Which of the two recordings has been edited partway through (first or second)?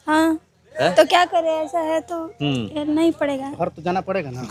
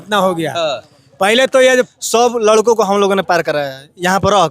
second